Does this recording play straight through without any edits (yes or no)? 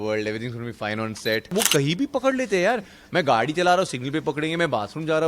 no